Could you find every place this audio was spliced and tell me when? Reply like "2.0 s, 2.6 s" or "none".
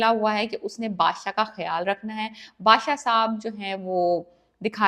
none